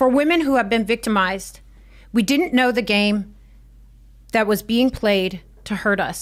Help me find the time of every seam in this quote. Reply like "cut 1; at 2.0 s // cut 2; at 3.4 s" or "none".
none